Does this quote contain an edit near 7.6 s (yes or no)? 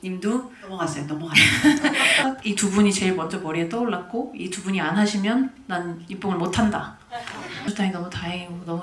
yes